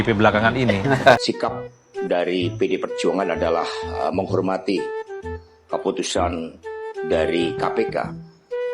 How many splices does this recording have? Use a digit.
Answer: 1